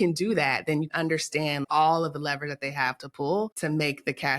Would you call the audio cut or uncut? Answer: cut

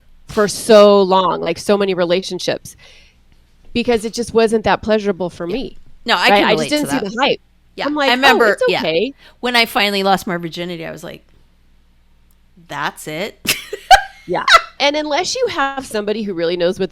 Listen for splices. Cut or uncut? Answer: cut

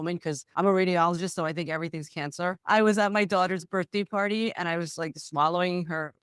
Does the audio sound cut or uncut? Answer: uncut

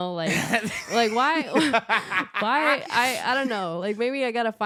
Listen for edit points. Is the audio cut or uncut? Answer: uncut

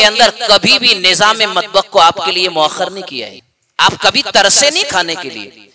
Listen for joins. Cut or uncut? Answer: uncut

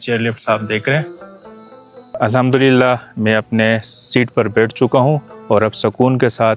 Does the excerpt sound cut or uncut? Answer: uncut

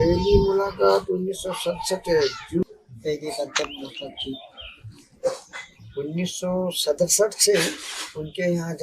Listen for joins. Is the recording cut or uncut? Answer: cut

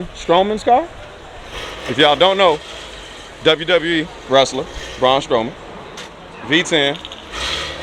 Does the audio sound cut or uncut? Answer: uncut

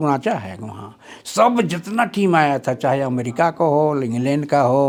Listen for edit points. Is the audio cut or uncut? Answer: uncut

